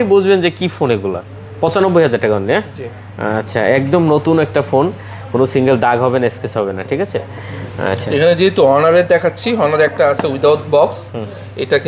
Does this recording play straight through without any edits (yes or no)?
yes